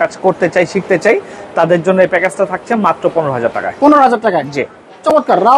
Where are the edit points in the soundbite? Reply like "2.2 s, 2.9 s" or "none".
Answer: none